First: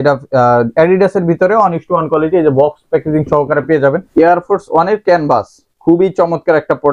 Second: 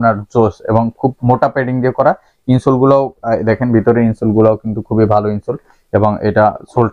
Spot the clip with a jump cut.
first; 1 cut; at 4.0 s

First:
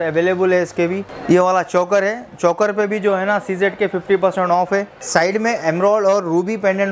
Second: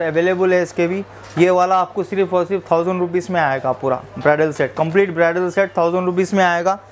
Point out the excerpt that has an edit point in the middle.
first; 2 cuts; at 1.1 s, 4.9 s

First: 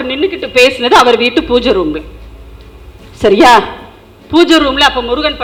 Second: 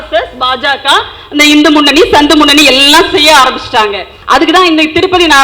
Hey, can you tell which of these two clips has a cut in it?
second; 1 cut; at 4.1 s

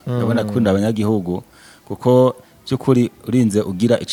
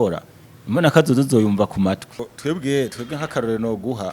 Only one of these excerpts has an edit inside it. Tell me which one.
second; 1 cut; at 2.3 s

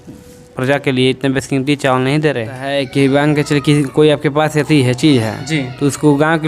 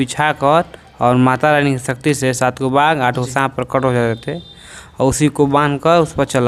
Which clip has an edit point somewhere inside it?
first; 1 cut; at 2.6 s

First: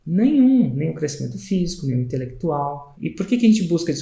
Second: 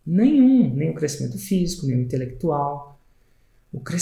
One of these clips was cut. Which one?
first; 1 cut; at 2.9 s

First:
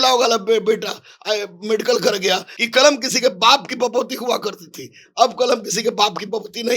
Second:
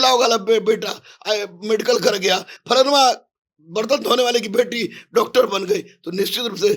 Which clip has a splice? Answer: first; 1 cut; at 2.5 s

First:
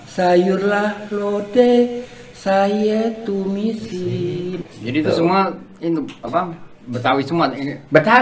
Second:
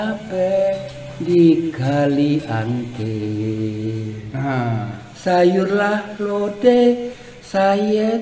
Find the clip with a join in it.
first; 1 cut; at 4.6 s

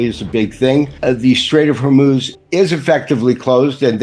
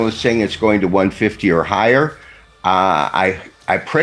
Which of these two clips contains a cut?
first; 2 cuts; at 0.9 s, 2.4 s

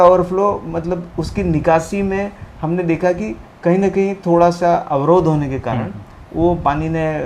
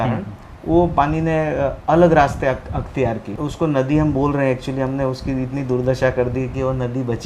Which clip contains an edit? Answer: second; 1 cut; at 3.3 s

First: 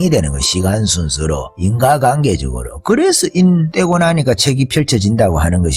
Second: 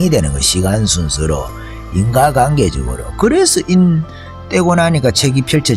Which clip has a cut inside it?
first; 2 cuts; at 1.5 s, 3.7 s

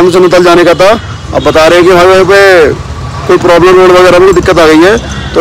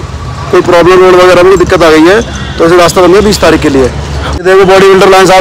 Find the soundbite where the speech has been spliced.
second; 1 cut; at 4.4 s

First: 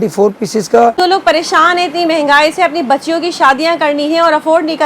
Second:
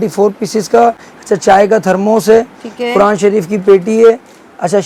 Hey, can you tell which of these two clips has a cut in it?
first; 1 cut; at 1.0 s

